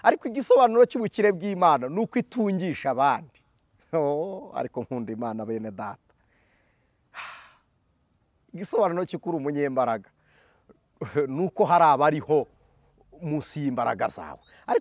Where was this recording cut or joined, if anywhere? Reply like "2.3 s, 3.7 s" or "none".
none